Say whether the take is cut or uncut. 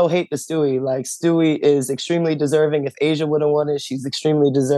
uncut